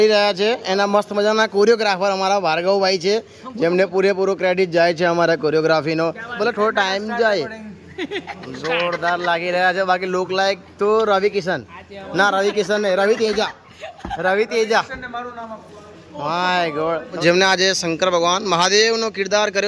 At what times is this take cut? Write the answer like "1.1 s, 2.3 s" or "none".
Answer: 6.4 s, 17.2 s